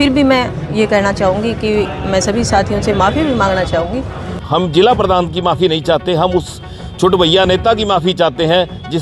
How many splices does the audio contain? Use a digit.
1